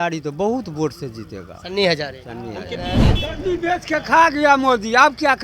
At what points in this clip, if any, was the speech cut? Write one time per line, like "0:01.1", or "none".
0:03.1